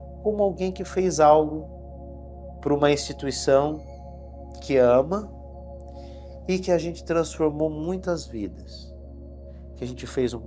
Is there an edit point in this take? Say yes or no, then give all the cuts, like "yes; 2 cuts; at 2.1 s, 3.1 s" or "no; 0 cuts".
no; 0 cuts